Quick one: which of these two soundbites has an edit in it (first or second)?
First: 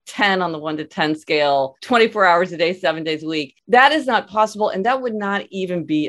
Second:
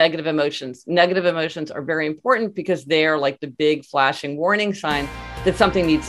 first